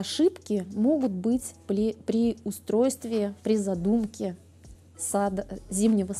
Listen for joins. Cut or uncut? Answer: uncut